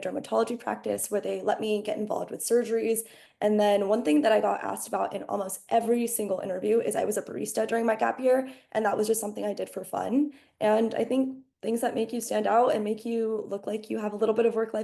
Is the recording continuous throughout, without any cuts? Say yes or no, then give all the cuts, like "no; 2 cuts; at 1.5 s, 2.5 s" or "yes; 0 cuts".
no; 1 cut; at 3.2 s